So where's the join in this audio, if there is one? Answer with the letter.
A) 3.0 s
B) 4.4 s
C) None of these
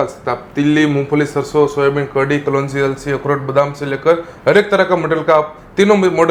C